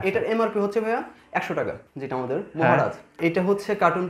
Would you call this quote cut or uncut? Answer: cut